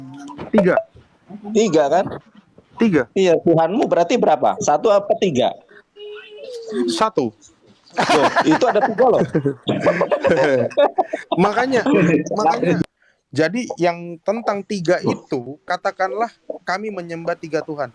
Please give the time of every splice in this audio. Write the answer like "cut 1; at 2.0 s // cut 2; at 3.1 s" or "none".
cut 1; at 12.8 s